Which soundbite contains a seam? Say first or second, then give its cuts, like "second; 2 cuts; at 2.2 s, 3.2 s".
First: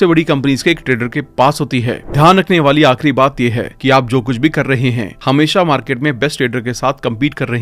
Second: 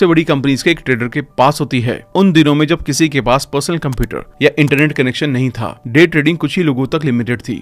first; 1 cut; at 2.0 s